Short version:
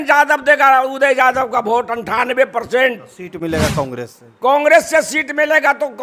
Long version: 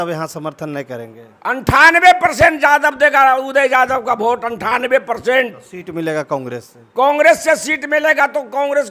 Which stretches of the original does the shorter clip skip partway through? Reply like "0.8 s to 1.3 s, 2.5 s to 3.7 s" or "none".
none

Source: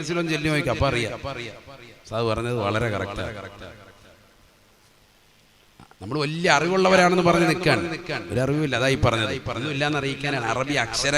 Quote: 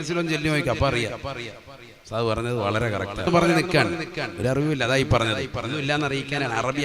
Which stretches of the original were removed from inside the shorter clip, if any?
3.3 s to 7.2 s

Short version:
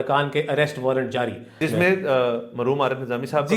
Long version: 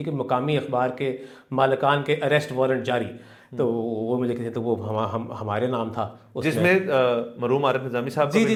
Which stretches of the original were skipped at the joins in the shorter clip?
3.2 s to 6.3 s

